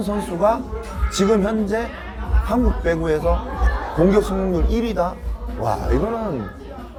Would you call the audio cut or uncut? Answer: uncut